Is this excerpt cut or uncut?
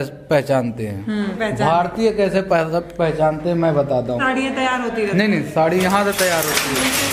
cut